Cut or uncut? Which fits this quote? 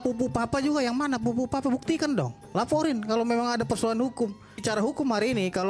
cut